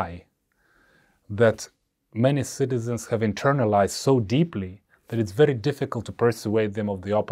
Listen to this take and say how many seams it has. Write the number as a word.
zero